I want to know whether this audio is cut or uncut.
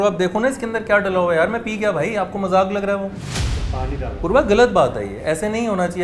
uncut